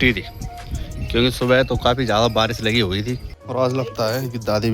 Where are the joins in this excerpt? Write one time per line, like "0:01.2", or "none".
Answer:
0:03.3